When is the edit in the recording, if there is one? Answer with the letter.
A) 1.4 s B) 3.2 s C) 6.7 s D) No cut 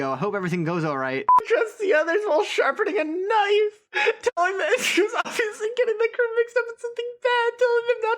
A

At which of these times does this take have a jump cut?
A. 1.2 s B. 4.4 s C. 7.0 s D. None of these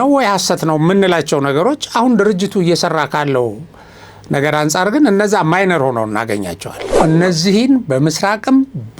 C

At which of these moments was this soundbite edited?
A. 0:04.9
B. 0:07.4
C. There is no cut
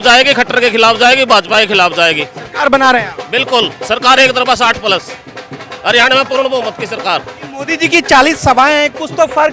B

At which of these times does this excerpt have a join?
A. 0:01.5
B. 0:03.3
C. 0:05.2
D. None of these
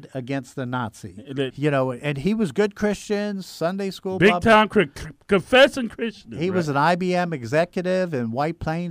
A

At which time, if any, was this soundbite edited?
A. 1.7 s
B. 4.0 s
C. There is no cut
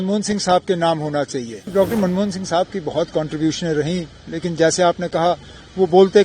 A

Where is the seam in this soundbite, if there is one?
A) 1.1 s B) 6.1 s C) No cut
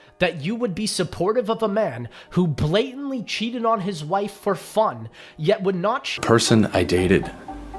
B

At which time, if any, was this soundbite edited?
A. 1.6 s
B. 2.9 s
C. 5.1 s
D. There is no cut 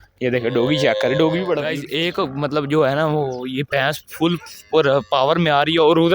A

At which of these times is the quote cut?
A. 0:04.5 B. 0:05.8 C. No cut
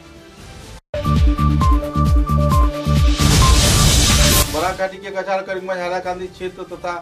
A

